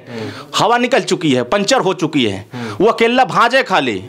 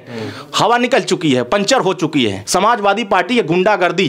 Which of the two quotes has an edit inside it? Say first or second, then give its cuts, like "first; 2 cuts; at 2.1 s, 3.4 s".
second; 1 cut; at 2.4 s